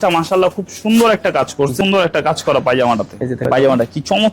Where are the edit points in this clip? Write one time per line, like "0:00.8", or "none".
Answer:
0:01.7
0:03.5